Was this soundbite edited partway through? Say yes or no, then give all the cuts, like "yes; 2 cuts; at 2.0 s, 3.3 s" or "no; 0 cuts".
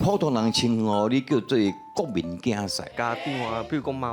yes; 1 cut; at 2.9 s